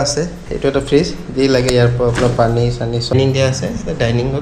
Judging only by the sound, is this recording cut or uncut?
cut